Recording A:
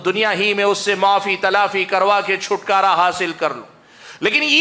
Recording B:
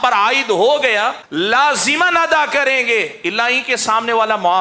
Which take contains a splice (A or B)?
B